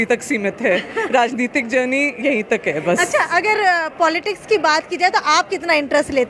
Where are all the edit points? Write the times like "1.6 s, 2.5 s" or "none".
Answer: none